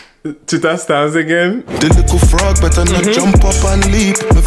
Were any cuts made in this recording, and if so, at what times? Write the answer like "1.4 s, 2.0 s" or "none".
1.7 s

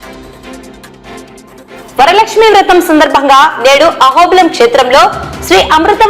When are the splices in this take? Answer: 1.4 s

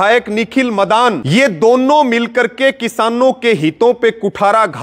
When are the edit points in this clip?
1.2 s

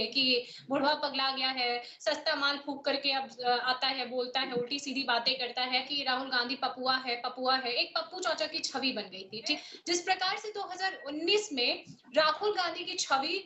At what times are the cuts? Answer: 5.9 s, 9.7 s

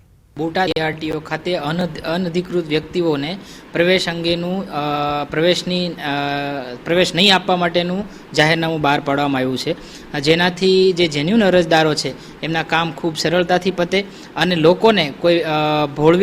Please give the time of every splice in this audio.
1.4 s

